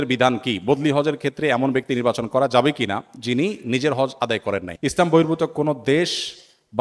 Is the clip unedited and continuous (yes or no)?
no